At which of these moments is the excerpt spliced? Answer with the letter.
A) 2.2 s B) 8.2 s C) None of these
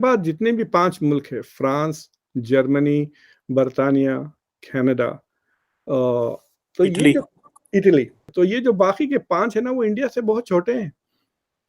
B